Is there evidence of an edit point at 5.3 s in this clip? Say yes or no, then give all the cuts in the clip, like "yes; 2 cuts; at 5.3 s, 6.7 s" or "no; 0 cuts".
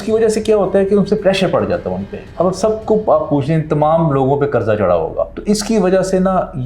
yes; 2 cuts; at 2.2 s, 5.3 s